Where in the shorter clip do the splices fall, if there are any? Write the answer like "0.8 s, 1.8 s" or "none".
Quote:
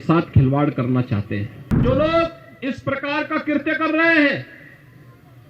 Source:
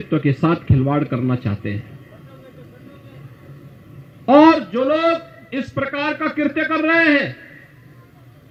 1.8 s